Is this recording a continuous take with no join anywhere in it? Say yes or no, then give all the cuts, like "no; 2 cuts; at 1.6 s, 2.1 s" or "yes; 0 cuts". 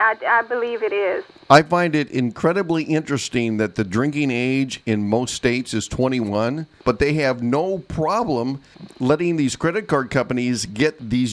no; 2 cuts; at 1.3 s, 6.8 s